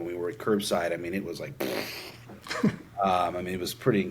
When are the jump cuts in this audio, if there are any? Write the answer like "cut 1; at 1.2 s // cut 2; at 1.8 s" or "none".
none